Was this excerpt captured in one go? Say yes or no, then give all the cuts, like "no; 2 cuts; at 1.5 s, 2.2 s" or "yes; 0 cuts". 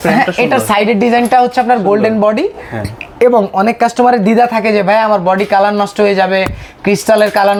yes; 0 cuts